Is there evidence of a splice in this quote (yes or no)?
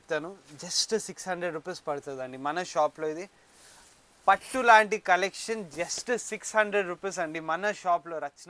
no